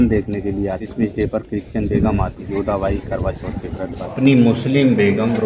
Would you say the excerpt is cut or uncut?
cut